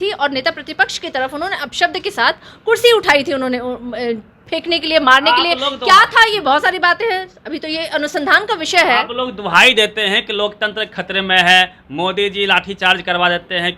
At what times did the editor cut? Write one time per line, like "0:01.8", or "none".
none